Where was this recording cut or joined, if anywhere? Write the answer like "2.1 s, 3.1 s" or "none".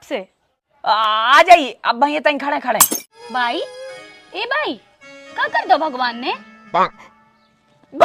3.1 s